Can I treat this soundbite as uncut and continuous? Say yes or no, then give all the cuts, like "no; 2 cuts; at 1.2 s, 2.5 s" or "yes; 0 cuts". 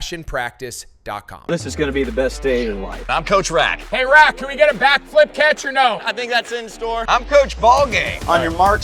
no; 1 cut; at 1.4 s